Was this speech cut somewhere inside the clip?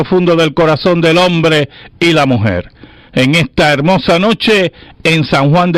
no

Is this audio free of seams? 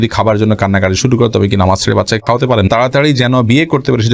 no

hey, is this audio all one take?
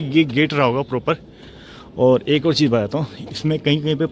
yes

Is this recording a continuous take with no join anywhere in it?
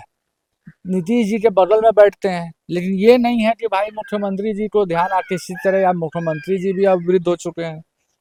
yes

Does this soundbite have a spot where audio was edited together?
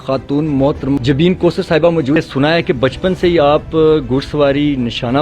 yes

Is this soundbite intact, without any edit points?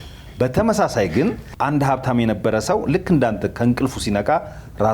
no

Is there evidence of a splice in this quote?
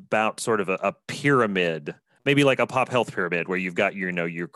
yes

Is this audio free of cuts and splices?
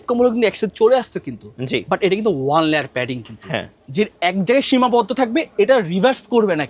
yes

